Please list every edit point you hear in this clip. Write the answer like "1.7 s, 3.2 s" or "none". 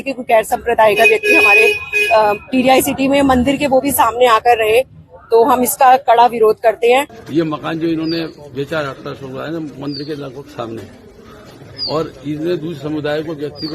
7.2 s